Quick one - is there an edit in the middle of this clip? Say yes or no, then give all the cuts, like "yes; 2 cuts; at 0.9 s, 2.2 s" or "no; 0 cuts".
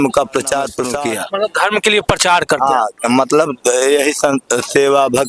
yes; 1 cut; at 0.9 s